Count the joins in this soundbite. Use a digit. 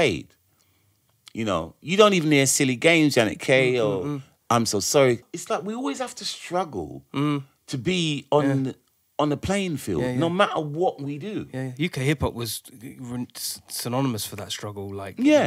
1